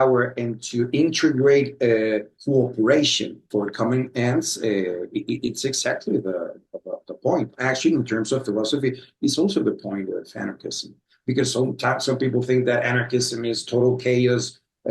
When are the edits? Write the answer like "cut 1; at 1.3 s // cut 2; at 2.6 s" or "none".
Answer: cut 1; at 2.3 s // cut 2; at 3.4 s